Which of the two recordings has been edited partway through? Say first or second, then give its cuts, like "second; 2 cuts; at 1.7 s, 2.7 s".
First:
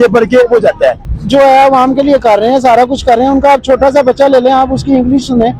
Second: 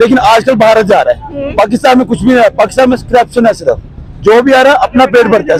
first; 1 cut; at 1.1 s